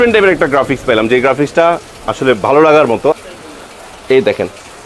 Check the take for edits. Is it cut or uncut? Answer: cut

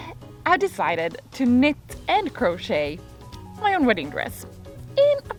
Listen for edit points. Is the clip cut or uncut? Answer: uncut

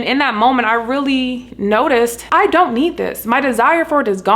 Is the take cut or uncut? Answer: cut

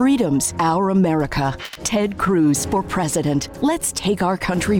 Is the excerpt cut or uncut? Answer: cut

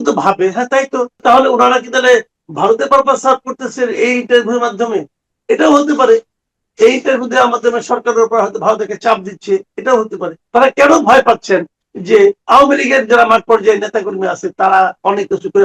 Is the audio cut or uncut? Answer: cut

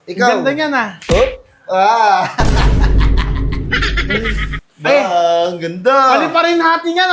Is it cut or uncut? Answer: cut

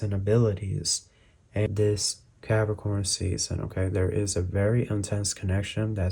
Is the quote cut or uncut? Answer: cut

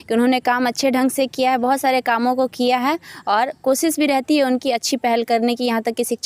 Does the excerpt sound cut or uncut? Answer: uncut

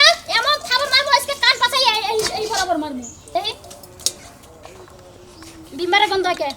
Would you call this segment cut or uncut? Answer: cut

